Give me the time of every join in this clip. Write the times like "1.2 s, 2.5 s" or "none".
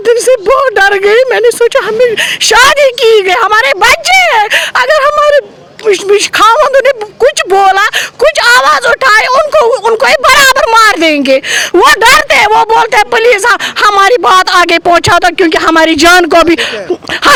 none

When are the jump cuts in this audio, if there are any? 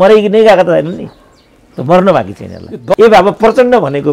2.9 s

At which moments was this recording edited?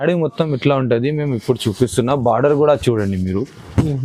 none

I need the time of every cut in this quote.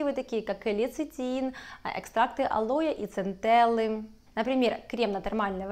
4.1 s

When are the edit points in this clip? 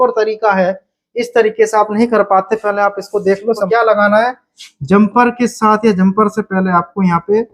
3.6 s

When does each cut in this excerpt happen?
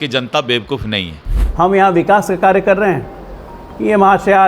1.3 s

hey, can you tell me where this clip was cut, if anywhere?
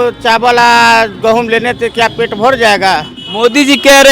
3.2 s

